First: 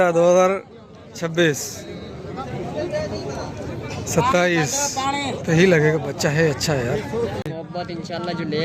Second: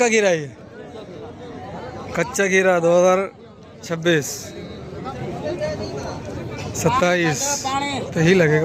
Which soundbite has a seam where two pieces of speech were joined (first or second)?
first